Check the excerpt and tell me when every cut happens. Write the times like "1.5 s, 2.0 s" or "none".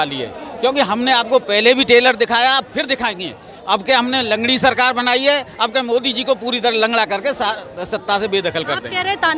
none